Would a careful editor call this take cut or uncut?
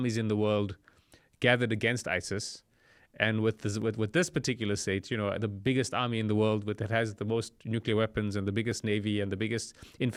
uncut